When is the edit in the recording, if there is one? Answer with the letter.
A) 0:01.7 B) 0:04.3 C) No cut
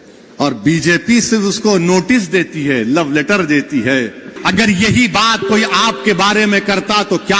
B